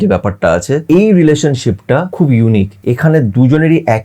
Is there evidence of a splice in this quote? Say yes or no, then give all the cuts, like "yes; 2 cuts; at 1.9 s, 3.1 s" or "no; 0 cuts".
yes; 3 cuts; at 0.8 s, 2.1 s, 2.7 s